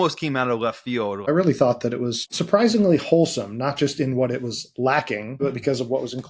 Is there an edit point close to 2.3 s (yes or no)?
yes